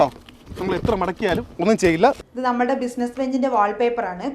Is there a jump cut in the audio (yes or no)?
yes